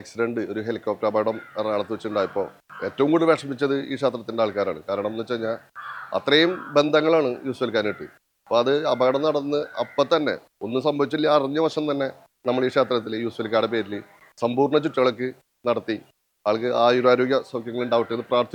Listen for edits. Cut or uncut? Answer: uncut